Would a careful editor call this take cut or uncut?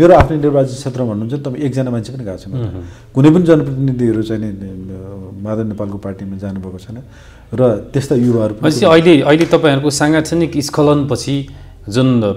uncut